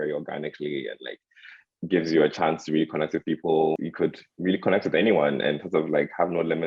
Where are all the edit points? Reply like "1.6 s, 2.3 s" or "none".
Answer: 3.9 s